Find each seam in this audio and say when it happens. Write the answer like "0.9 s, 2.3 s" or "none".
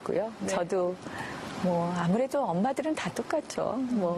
3.2 s

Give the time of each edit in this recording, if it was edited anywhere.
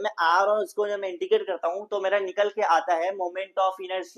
none

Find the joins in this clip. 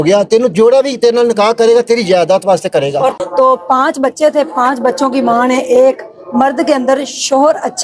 3.2 s

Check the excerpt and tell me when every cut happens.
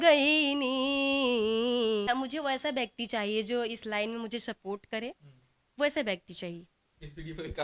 2.1 s

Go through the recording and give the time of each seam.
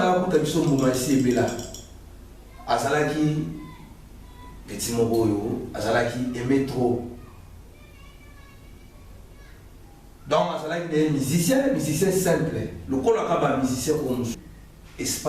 14.4 s

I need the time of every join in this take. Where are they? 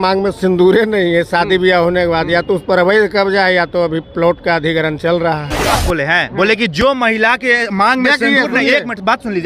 5.8 s

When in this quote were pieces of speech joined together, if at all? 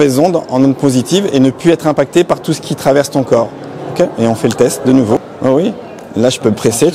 5.2 s

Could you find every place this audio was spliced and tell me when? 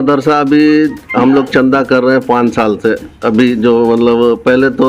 none

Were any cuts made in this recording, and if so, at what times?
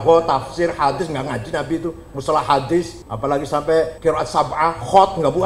3.0 s, 3.9 s

